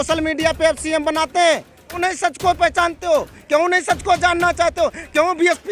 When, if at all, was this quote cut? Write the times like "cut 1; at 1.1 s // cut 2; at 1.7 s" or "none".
cut 1; at 2.0 s